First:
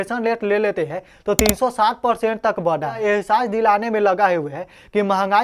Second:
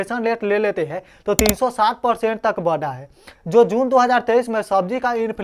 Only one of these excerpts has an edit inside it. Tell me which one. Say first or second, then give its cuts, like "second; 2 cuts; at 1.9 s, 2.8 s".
first; 1 cut; at 3.0 s